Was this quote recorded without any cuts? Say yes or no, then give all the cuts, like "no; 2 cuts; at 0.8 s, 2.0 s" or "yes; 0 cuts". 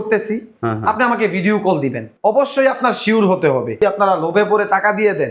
no; 2 cuts; at 2.1 s, 3.8 s